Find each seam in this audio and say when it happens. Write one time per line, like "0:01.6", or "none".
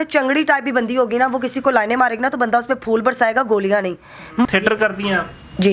0:04.4